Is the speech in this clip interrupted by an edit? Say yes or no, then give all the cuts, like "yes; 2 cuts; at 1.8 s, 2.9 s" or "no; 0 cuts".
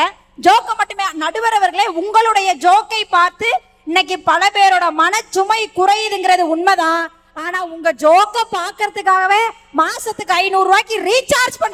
no; 0 cuts